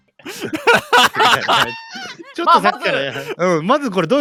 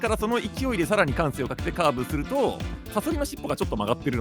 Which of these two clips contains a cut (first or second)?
second